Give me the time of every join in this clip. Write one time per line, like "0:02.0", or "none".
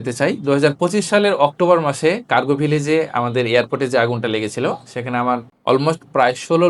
none